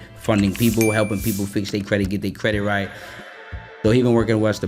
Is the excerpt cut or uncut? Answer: cut